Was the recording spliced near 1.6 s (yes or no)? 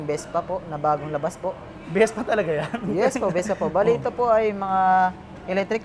no